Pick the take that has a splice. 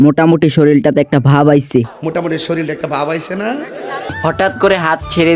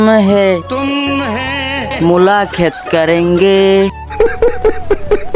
first; 1 cut; at 4.2 s

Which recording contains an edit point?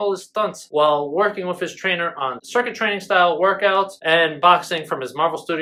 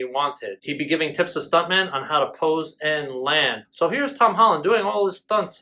second; 1 cut; at 3.6 s

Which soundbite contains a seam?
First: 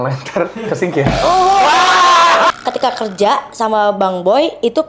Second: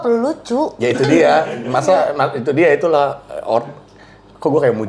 first; 1 cut; at 2.5 s

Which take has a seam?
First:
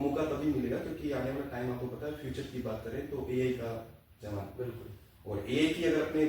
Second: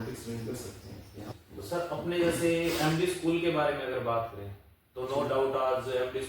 second; 1 cut; at 1.3 s

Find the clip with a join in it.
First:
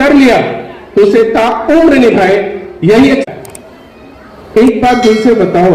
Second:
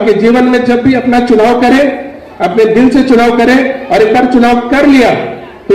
first; 1 cut; at 3.2 s

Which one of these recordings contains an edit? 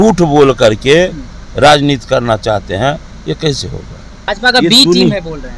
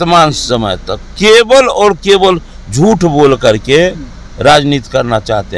first; 1 cut; at 4.4 s

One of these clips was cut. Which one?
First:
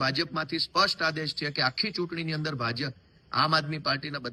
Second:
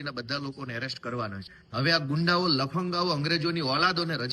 second; 1 cut; at 1.5 s

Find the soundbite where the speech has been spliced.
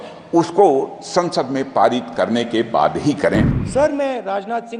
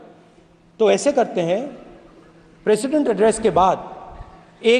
first; 1 cut; at 3.6 s

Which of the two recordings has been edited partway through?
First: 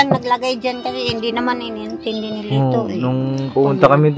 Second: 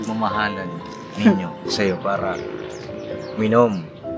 second; 1 cut; at 1.7 s

